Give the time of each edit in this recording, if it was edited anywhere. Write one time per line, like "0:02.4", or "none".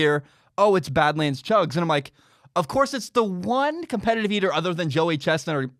none